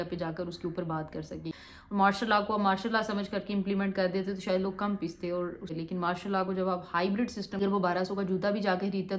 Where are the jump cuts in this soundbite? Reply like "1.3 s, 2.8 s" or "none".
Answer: 1.5 s, 5.7 s, 7.6 s